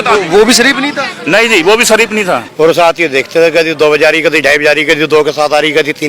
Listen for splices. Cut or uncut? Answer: cut